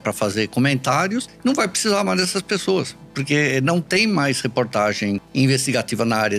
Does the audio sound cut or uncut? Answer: cut